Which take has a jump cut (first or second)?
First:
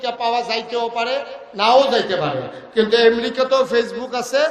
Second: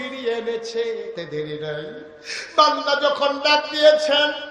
second